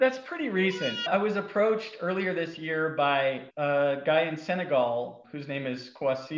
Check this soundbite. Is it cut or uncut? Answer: cut